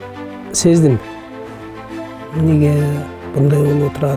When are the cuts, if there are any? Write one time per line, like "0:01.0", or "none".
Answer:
none